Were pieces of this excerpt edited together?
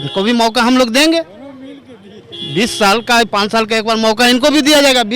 no; 0 cuts

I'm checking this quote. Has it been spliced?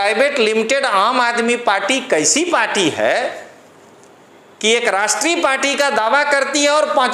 no; 0 cuts

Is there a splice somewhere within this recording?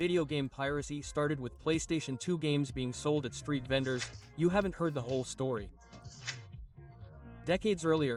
no; 0 cuts

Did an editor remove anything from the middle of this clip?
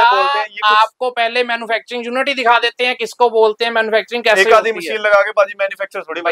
no; 0 cuts

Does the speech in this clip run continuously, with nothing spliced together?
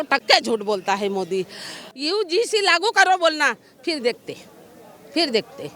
no; 1 cut; at 1.8 s

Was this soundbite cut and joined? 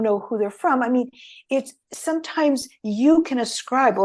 no; 0 cuts

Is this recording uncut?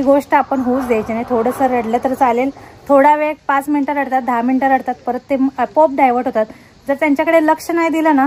yes; 0 cuts

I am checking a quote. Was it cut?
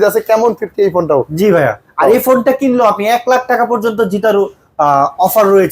no; 0 cuts

